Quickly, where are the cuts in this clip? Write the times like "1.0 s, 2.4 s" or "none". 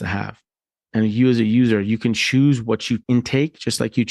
3.0 s